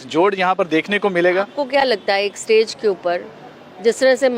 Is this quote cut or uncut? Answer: uncut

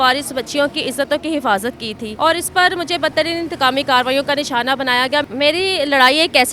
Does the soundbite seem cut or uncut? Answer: cut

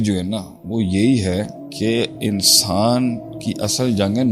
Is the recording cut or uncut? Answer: cut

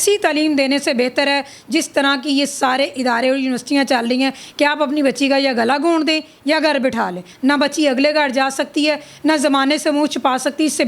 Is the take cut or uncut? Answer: cut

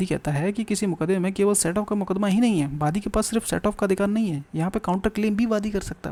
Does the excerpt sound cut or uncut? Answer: uncut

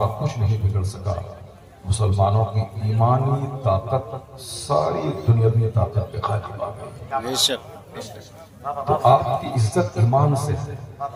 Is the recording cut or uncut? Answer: uncut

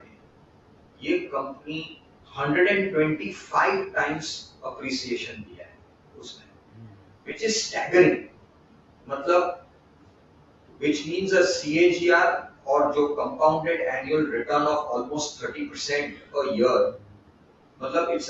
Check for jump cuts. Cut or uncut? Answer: uncut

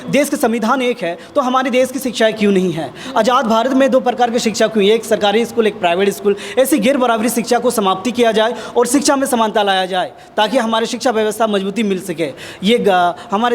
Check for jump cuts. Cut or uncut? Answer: uncut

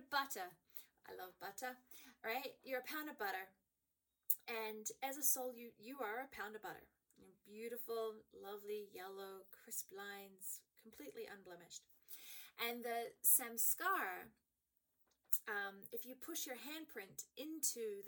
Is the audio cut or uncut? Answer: uncut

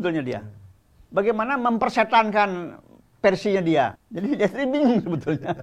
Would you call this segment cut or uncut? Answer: cut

